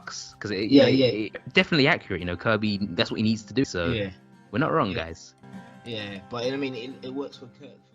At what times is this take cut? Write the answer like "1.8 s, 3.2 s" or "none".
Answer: 1.4 s, 3.6 s